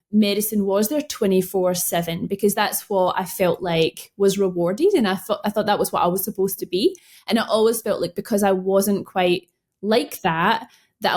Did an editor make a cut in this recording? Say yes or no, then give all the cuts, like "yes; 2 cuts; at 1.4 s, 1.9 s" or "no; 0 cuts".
no; 0 cuts